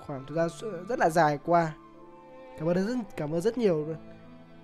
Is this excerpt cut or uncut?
uncut